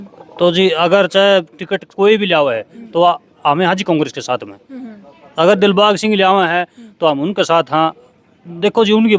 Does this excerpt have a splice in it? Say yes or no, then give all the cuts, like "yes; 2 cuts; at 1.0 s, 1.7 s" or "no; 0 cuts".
no; 0 cuts